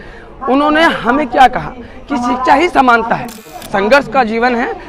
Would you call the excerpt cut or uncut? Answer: cut